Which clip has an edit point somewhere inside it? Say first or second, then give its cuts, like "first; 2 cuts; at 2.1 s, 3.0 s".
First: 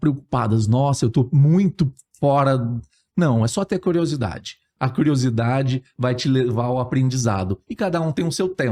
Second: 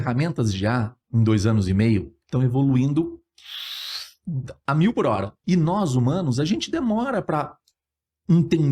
second; 1 cut; at 5.3 s